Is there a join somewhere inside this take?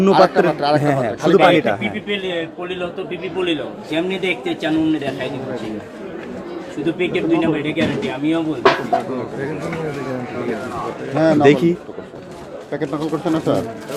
no; 0 cuts

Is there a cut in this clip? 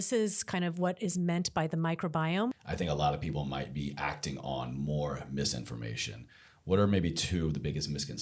yes; 1 cut; at 2.6 s

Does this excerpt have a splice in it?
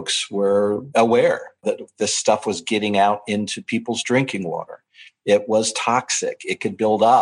yes; 2 cuts; at 0.9 s, 1.6 s

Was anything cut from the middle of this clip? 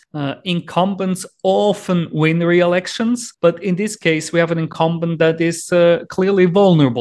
no; 0 cuts

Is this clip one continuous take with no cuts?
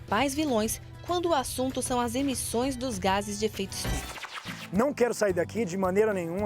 no; 1 cut; at 4.3 s

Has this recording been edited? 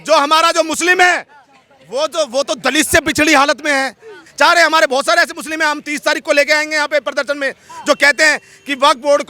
yes; 1 cut; at 4.3 s

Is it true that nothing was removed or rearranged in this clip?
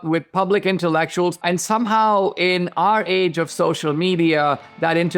no; 1 cut; at 1.4 s

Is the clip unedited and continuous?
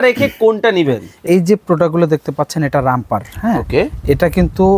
no; 1 cut; at 1.1 s

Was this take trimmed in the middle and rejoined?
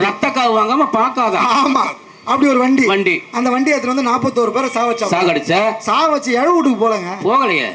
no; 0 cuts

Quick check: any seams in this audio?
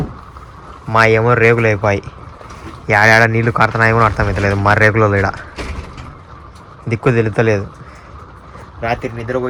no; 0 cuts

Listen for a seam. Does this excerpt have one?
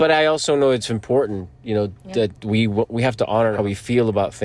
yes; 1 cut; at 3.5 s

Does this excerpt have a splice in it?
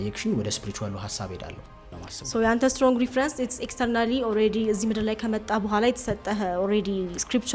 yes; 1 cut; at 2.0 s

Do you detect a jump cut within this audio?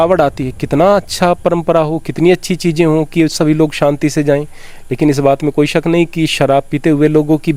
no; 0 cuts

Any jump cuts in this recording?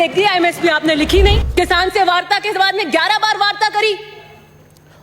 yes; 1 cut; at 1.4 s

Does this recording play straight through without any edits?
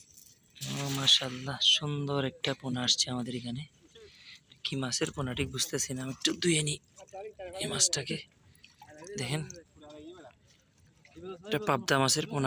yes; 0 cuts

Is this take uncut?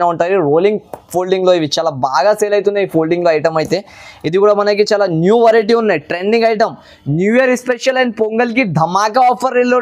yes; 0 cuts

